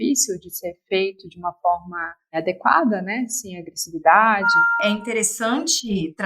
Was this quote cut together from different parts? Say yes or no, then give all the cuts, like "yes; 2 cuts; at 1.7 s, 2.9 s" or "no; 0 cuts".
yes; 1 cut; at 4.7 s